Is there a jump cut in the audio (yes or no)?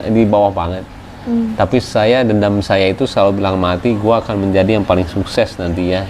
no